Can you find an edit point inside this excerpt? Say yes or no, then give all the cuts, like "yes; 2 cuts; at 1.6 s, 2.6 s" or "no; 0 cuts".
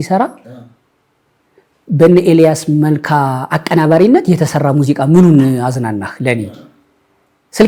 no; 0 cuts